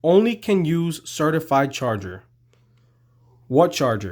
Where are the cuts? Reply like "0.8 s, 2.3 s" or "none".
none